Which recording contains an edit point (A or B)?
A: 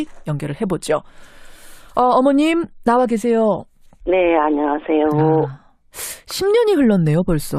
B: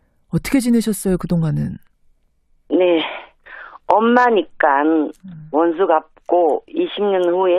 B